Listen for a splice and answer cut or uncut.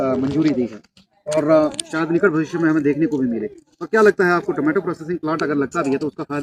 uncut